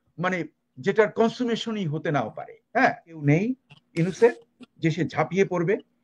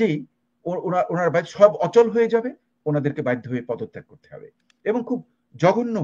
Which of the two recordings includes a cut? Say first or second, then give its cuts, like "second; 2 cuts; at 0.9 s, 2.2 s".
first; 1 cut; at 3.2 s